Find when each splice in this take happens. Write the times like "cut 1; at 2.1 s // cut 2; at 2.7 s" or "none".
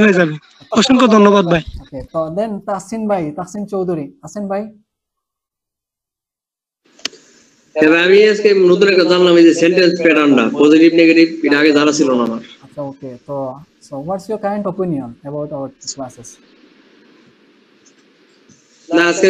cut 1; at 2.1 s